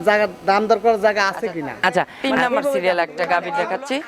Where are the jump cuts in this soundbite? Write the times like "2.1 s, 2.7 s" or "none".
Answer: 2.8 s